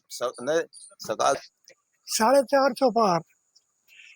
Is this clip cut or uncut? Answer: cut